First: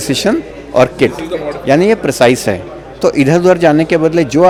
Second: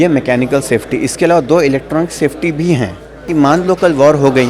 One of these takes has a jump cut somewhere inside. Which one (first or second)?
second